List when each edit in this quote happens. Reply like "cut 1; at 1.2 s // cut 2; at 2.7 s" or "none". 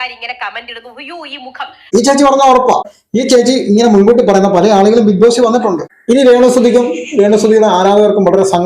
cut 1; at 1.8 s // cut 2; at 5.9 s